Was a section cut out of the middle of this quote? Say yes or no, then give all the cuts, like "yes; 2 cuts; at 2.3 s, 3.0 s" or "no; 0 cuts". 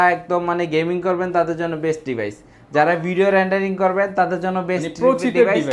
no; 0 cuts